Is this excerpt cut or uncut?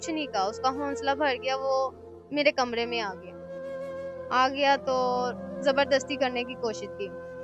uncut